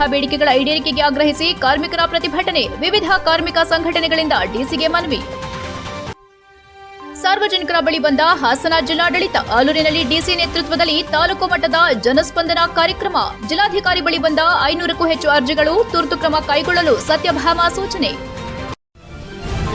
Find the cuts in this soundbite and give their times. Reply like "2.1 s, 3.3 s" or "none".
18.7 s